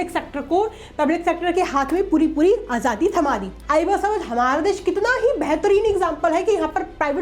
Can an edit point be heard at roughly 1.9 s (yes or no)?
no